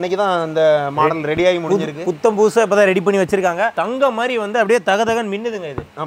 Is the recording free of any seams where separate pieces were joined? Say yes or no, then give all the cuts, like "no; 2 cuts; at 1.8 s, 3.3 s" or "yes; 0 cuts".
yes; 0 cuts